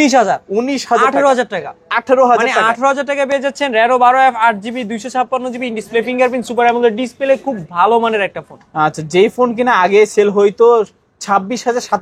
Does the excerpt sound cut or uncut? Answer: uncut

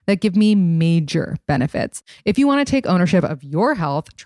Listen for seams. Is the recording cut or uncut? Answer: cut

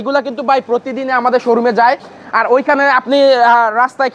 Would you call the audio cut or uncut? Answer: uncut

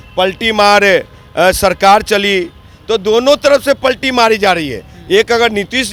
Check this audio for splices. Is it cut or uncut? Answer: uncut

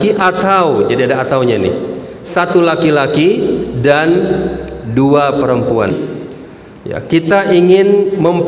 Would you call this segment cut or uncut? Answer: cut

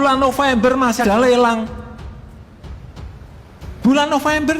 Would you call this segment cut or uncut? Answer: cut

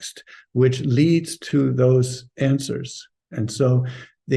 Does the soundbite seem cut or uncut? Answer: uncut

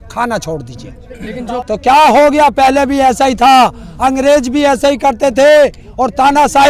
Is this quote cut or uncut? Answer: cut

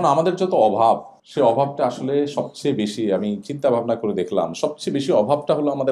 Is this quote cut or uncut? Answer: cut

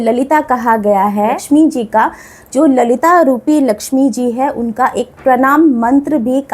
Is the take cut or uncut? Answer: cut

